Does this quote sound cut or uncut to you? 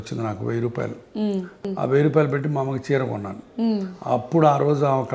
cut